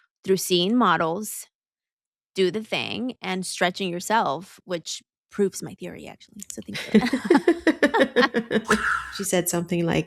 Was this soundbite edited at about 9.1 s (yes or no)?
yes